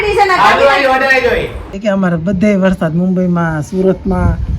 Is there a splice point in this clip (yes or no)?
yes